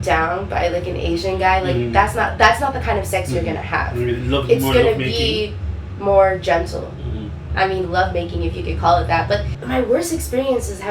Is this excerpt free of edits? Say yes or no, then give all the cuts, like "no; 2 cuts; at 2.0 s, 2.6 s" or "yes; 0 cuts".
no; 1 cut; at 9.6 s